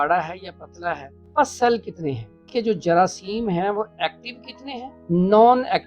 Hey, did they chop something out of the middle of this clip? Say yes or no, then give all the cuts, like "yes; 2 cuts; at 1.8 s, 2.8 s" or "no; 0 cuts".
yes; 3 cuts; at 1.2 s, 2.4 s, 4.9 s